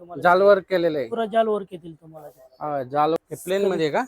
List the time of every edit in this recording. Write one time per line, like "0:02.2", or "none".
0:03.2